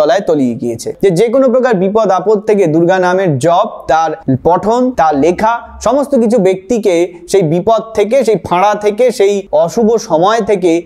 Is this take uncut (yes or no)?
no